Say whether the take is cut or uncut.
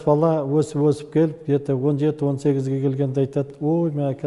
uncut